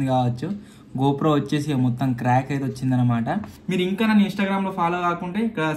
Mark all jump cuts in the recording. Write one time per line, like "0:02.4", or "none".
0:03.5